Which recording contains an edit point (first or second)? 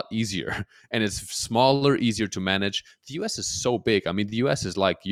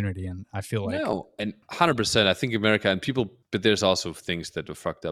second